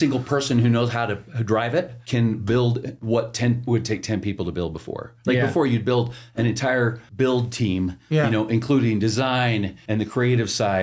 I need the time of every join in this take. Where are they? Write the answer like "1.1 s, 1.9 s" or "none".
2.0 s, 2.9 s, 7.0 s, 9.8 s